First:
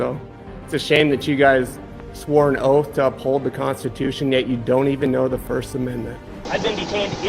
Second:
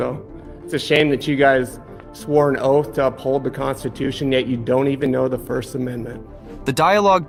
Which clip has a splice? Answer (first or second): first